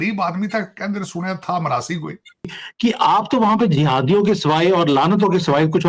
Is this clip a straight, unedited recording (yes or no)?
no